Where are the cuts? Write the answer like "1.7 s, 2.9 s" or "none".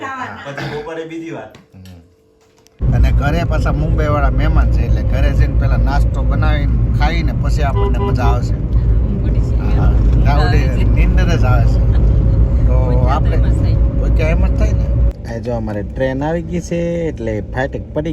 2.8 s, 15.2 s